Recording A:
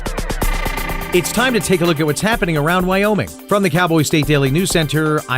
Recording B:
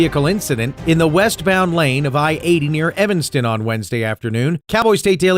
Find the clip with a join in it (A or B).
A